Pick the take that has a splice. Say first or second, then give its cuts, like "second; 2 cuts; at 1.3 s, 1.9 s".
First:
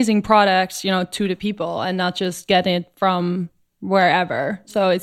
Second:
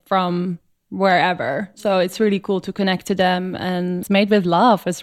second; 1 cut; at 4.0 s